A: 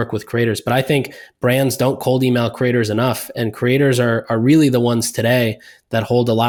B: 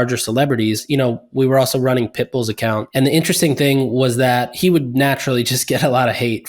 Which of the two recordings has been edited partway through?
B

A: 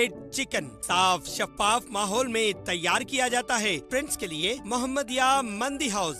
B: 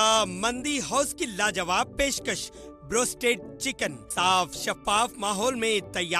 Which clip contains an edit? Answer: A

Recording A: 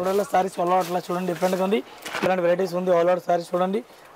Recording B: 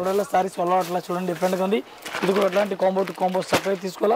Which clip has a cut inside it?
A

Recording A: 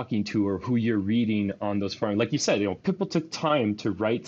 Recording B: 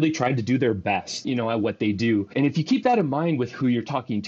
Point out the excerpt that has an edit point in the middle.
B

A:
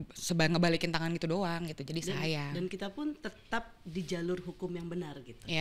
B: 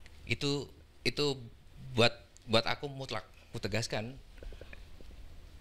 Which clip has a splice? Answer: B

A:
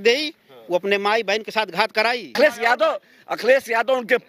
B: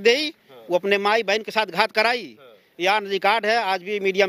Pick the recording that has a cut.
A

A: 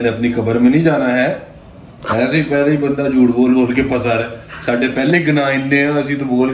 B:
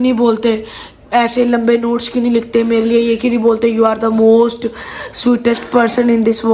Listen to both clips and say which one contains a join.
A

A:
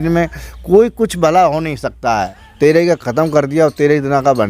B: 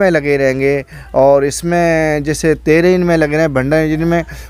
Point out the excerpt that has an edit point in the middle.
A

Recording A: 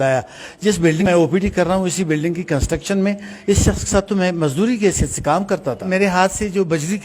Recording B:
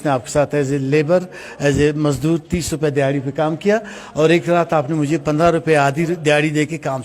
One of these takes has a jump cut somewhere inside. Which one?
A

